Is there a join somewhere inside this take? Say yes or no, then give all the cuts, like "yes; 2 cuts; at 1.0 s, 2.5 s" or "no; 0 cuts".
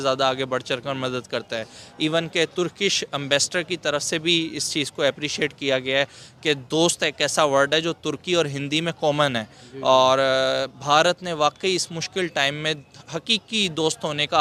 no; 0 cuts